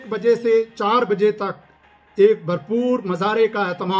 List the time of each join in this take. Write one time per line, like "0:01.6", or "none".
none